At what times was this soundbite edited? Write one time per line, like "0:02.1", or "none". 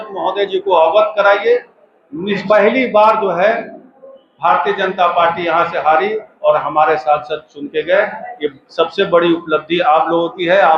0:02.4